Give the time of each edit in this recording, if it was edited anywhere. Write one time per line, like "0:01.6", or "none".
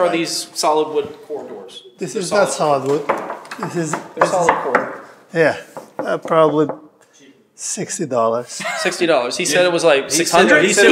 none